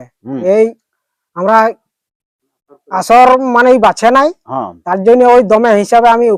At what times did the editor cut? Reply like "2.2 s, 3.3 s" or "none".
none